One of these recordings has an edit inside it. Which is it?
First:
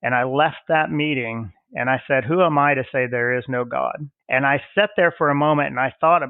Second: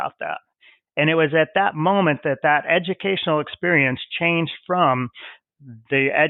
first; 1 cut; at 4.1 s

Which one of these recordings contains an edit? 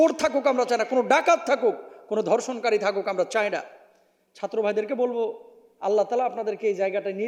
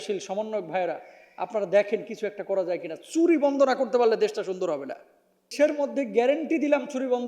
second; 1 cut; at 5.5 s

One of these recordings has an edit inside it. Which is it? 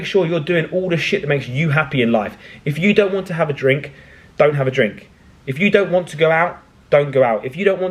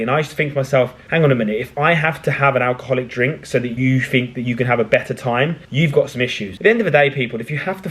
second; 4 cuts; at 1.0 s, 3.7 s, 5.6 s, 6.4 s

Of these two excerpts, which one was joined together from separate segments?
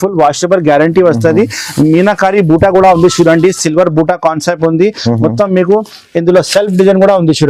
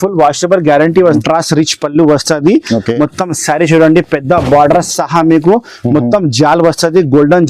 second; 1 cut; at 1.2 s

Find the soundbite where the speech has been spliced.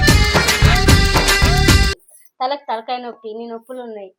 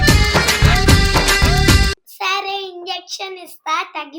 second; 1 cut; at 2.0 s

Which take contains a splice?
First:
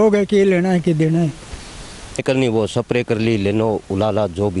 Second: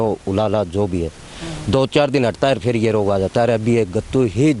first; 1 cut; at 2.2 s

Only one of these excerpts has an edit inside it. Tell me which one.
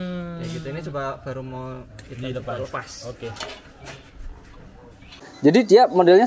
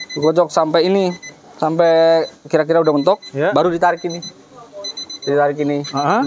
first; 1 cut; at 5.2 s

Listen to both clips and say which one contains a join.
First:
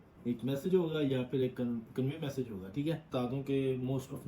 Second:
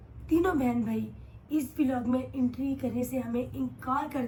first; 1 cut; at 3.1 s

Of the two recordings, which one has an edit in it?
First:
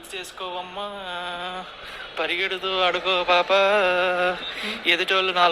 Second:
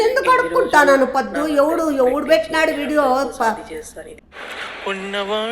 second; 1 cut; at 4.2 s

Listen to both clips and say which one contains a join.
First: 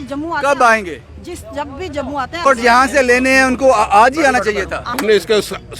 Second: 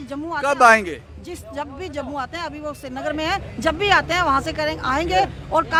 first; 2 cuts; at 2.5 s, 4.9 s

